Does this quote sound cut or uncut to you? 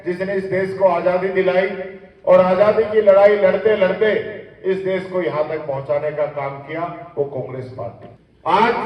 uncut